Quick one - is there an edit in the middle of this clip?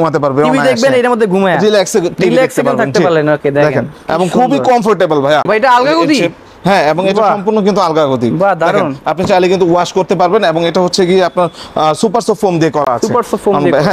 no; 0 cuts

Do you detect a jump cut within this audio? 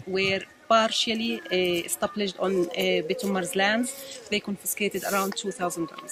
yes; 1 cut; at 2.7 s

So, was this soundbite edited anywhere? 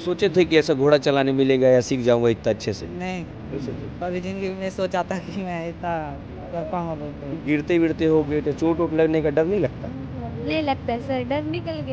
yes; 1 cut; at 7.4 s

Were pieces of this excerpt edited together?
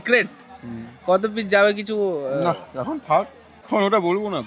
no; 0 cuts

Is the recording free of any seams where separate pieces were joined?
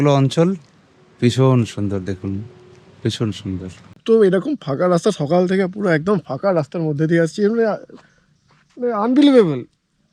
no; 1 cut; at 4.0 s

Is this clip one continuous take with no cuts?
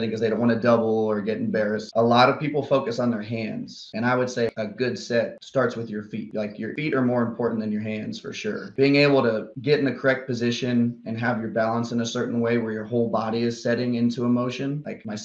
no; 5 cuts; at 1.8 s, 3.8 s, 4.5 s, 6.7 s, 8.7 s

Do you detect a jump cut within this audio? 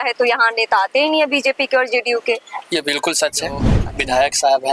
yes; 1 cut; at 3.8 s

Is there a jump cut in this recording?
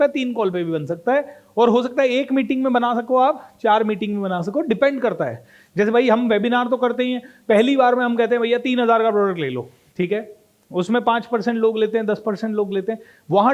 yes; 1 cut; at 9.8 s

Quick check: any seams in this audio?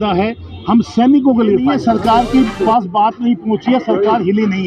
yes; 1 cut; at 1.6 s

